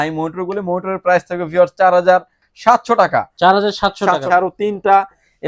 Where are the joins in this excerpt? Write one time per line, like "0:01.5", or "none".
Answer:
0:04.2